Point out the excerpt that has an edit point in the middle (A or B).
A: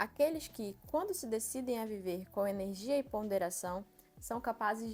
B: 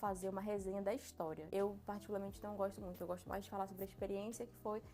B